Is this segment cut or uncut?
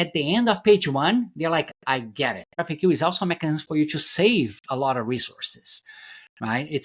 cut